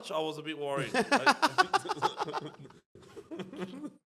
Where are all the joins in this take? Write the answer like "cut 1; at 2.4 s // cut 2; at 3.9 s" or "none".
none